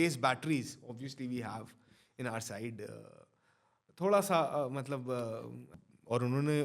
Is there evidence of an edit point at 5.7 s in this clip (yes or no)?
yes